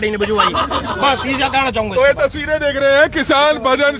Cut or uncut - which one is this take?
uncut